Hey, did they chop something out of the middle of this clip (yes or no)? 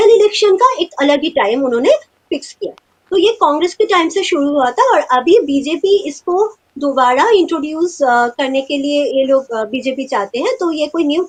no